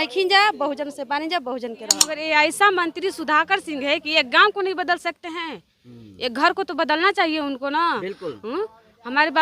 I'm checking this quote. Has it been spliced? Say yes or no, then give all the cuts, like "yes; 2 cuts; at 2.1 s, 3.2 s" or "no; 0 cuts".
yes; 1 cut; at 2.1 s